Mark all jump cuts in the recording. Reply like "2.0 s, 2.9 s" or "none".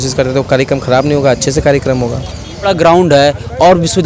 2.6 s